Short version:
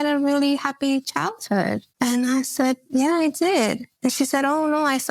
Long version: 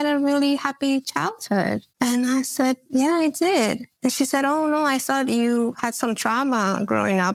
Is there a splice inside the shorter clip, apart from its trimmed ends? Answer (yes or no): no